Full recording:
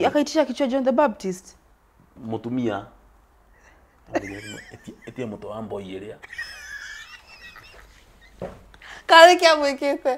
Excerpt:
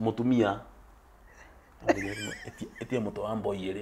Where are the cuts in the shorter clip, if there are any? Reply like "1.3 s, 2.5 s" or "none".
none